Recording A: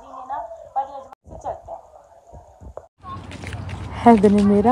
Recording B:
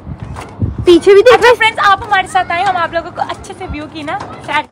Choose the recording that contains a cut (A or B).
A